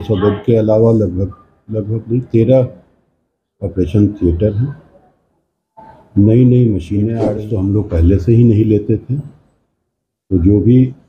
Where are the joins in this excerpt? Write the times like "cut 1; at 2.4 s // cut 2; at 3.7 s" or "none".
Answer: cut 1; at 7.4 s